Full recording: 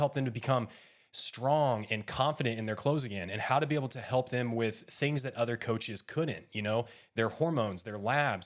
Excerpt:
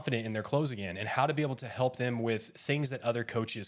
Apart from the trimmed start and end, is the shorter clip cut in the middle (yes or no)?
no